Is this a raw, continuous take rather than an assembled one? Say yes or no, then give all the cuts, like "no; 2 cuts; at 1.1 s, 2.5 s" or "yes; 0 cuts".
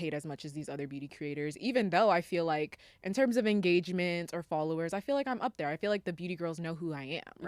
yes; 0 cuts